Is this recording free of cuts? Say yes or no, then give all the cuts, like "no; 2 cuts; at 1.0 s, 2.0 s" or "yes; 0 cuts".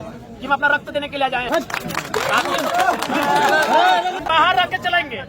no; 2 cuts; at 1.5 s, 4.2 s